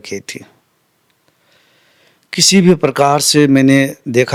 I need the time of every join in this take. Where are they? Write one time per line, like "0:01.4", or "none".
none